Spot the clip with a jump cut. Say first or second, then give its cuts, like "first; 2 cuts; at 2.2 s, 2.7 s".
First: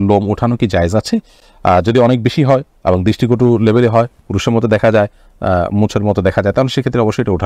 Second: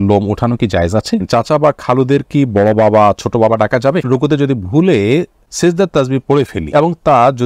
second; 4 cuts; at 1.2 s, 4.1 s, 5.4 s, 6.6 s